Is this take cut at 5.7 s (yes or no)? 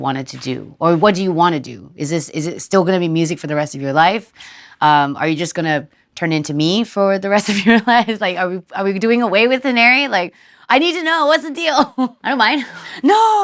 no